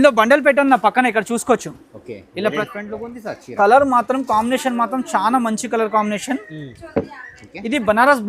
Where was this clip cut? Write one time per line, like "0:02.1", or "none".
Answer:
0:02.6